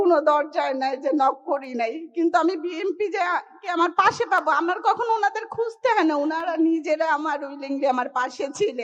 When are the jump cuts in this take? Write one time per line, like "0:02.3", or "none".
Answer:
none

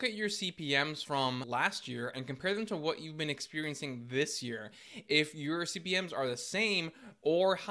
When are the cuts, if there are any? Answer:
0:01.2

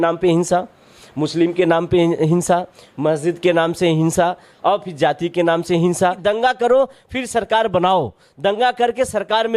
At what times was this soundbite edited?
0:06.2

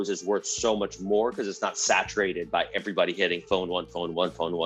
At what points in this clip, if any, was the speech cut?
none

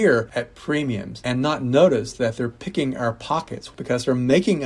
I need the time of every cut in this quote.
0:03.6

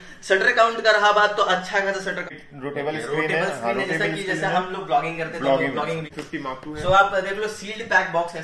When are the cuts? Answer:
0:02.3
0:06.7

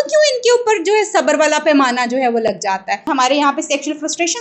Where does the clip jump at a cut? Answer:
0:03.1

